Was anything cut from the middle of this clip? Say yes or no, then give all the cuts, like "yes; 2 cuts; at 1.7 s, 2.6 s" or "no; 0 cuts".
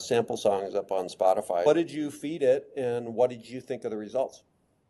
yes; 1 cut; at 1.7 s